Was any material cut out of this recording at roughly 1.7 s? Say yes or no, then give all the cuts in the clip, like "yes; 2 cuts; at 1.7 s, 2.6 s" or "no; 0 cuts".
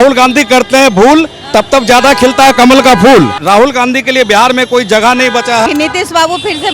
no; 2 cuts; at 3.4 s, 5.7 s